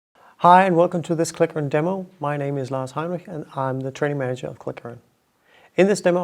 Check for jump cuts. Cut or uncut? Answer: uncut